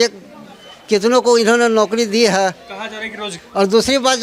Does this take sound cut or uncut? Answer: cut